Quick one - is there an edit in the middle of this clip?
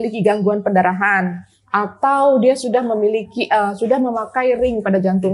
no; 0 cuts

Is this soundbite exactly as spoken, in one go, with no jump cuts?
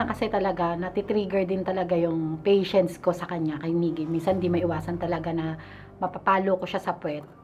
yes; 0 cuts

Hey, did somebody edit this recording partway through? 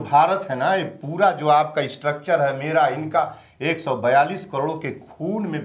no; 0 cuts

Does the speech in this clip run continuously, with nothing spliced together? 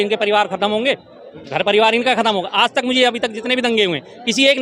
yes; 0 cuts

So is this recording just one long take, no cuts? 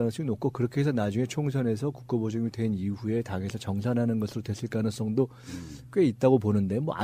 yes; 0 cuts

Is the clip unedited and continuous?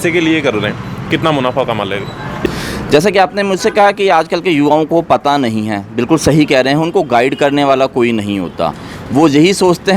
no; 1 cut; at 2.5 s

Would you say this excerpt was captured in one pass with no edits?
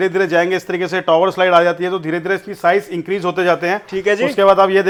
yes; 0 cuts

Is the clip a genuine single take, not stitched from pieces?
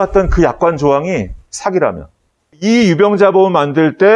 no; 1 cut; at 2.6 s

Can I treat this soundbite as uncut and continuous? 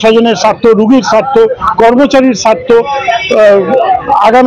yes; 0 cuts

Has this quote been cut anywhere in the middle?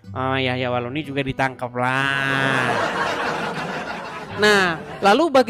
yes; 1 cut; at 3.5 s

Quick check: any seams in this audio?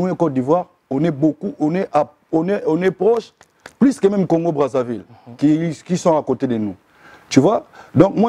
no; 0 cuts

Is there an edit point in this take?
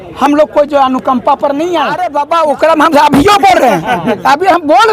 yes; 1 cut; at 2.0 s

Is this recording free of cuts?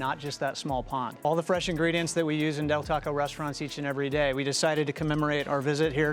no; 1 cut; at 1.2 s

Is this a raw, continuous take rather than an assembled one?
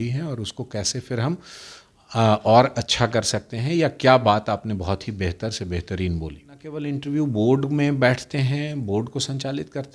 no; 1 cut; at 6.9 s

